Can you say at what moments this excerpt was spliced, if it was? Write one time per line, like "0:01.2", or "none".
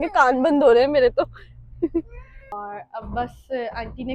0:02.4